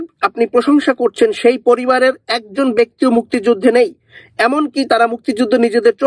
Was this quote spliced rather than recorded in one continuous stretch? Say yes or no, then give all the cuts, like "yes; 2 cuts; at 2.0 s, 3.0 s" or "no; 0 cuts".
no; 0 cuts